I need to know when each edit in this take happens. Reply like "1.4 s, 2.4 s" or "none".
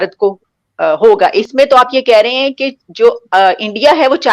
1.5 s